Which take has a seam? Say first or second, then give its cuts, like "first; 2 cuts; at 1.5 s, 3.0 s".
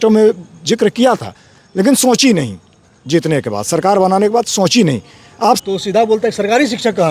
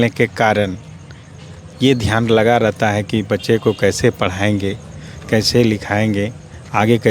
first; 1 cut; at 5.6 s